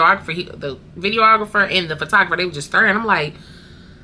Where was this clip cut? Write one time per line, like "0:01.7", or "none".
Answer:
none